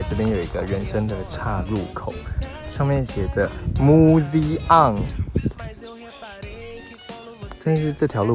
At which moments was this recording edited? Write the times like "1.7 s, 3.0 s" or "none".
none

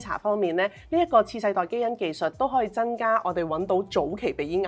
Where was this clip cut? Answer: none

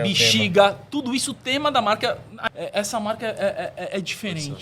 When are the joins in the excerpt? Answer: 2.3 s

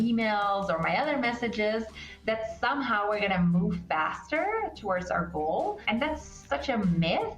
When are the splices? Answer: 6.5 s

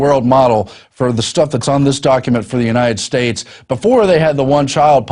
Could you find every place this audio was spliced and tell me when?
3.6 s

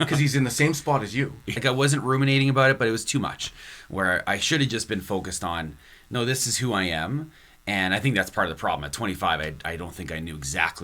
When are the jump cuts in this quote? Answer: 1.4 s

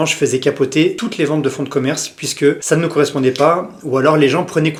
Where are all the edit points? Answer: none

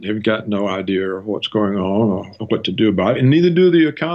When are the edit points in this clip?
2.4 s

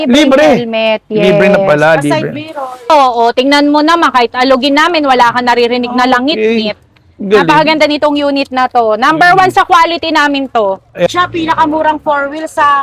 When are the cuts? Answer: 2.9 s, 11.1 s

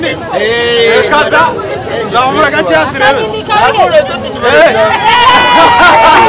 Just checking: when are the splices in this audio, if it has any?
none

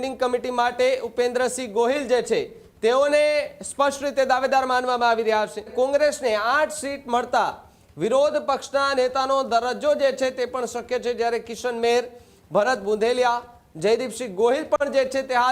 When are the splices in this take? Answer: 5.7 s

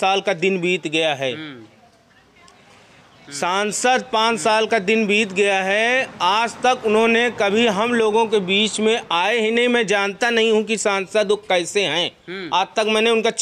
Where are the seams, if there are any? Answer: none

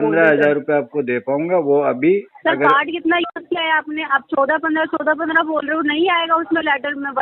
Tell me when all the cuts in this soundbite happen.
none

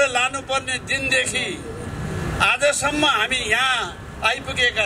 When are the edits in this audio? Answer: none

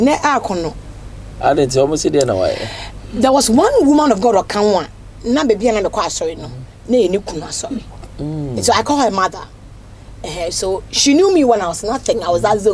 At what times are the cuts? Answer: none

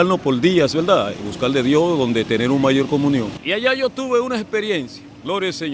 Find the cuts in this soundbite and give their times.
3.4 s

